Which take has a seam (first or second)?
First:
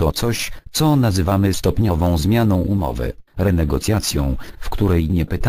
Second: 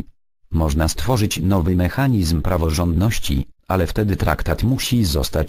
first